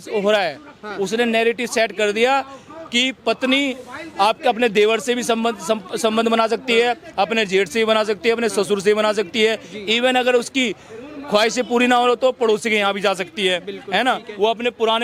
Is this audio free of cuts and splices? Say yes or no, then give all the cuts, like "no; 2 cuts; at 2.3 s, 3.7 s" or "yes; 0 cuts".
yes; 0 cuts